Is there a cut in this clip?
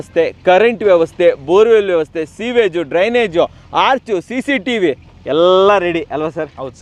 no; 0 cuts

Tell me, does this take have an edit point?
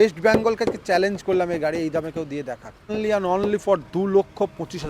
yes; 1 cut; at 2.9 s

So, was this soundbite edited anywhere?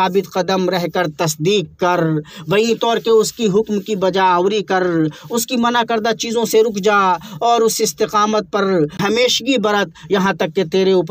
yes; 1 cut; at 9.0 s

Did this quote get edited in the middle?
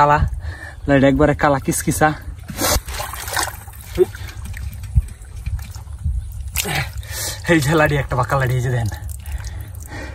yes; 1 cut; at 2.8 s

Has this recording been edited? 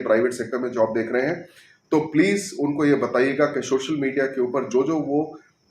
no; 0 cuts

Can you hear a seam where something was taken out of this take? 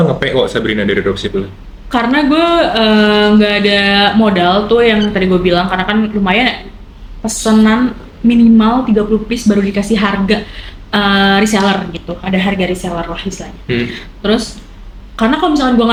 no; 0 cuts

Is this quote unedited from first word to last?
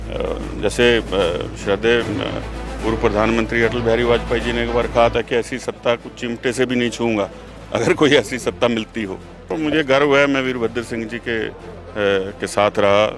no; 1 cut; at 9.4 s

